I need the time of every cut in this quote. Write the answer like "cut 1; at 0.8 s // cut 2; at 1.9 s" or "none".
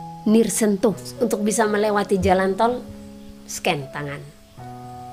cut 1; at 1.1 s